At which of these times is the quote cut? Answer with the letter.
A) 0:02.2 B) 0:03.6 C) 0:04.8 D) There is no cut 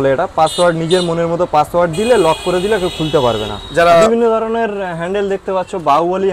B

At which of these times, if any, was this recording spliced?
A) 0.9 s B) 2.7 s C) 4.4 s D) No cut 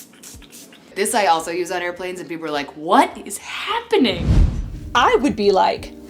A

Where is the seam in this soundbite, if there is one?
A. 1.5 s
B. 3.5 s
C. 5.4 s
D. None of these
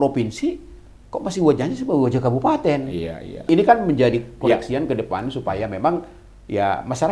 B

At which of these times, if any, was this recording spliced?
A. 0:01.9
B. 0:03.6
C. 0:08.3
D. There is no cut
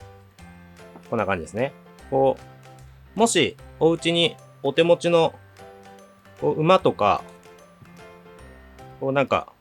A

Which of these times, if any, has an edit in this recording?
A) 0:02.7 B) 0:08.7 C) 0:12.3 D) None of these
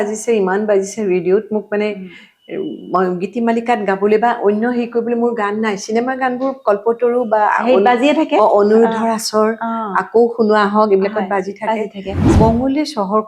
C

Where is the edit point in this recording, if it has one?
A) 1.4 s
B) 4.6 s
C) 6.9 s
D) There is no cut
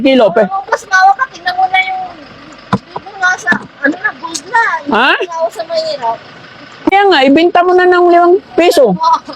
C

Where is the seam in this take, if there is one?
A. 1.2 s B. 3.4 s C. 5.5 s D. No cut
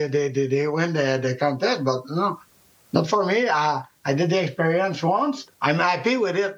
C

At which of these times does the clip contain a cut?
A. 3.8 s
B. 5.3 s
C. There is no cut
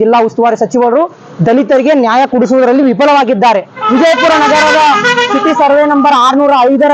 A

